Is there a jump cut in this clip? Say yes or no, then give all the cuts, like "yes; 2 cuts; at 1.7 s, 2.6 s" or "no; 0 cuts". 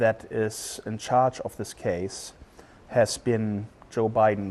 yes; 1 cut; at 1.2 s